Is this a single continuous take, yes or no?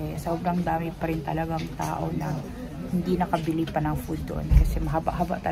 yes